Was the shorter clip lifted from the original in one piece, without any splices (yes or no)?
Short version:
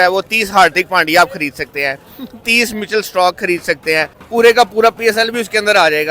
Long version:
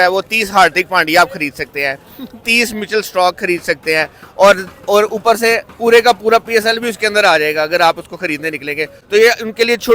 no